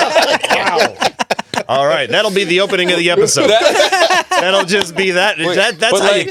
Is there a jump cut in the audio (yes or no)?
no